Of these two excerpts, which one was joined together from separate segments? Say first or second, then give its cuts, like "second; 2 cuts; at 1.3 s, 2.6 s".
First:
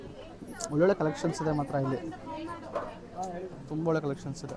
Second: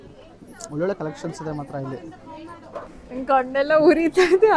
second; 1 cut; at 3.0 s